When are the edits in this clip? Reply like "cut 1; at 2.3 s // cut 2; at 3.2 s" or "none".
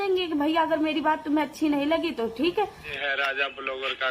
cut 1; at 2.9 s